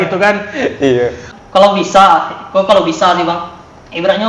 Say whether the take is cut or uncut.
cut